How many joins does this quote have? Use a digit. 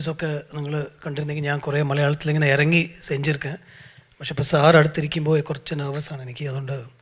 0